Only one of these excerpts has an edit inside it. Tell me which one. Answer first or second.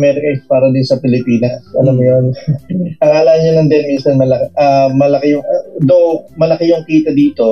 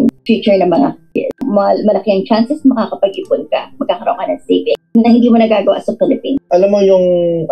second